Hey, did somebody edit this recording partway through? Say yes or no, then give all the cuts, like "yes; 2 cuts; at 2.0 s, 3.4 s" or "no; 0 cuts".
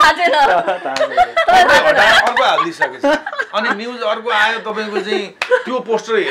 no; 0 cuts